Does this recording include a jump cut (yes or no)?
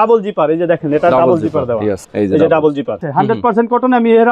yes